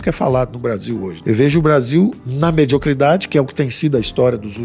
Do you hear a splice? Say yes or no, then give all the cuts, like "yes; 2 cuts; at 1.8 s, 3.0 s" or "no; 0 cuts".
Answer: yes; 1 cut; at 1.1 s